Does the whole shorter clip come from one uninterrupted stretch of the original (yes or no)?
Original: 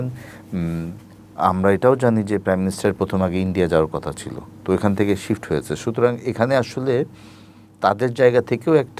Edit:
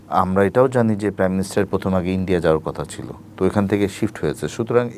yes